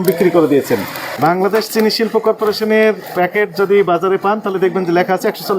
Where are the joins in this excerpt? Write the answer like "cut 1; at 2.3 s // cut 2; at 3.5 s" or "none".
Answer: cut 1; at 1.2 s